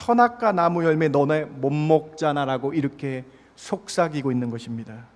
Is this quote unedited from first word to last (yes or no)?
yes